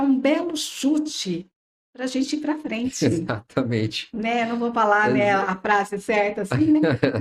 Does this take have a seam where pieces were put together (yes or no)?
no